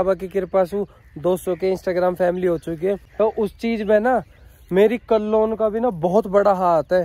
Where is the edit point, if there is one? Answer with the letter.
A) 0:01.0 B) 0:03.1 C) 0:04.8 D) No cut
B